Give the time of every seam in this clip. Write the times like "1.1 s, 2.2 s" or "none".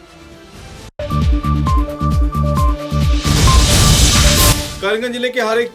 none